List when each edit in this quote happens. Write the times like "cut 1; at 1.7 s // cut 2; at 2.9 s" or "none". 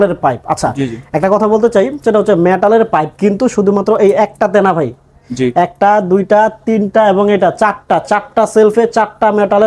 none